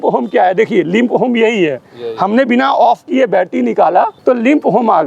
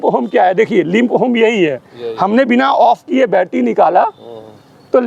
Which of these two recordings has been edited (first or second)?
first